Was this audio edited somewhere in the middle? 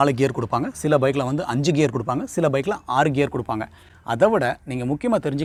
no; 0 cuts

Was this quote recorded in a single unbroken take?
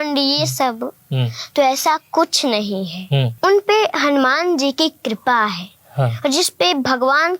no; 1 cut; at 3.3 s

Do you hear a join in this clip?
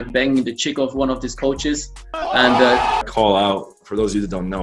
yes; 1 cut; at 3.0 s

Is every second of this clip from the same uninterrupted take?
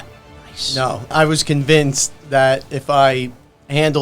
no; 1 cut; at 1.1 s

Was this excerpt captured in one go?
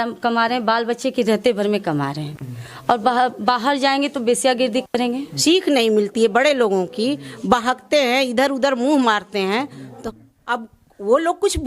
no; 2 cuts; at 5.3 s, 10.0 s

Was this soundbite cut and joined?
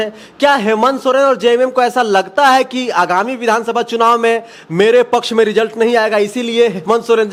no; 0 cuts

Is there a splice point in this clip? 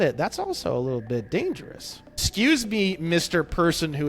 yes; 1 cut; at 2.2 s

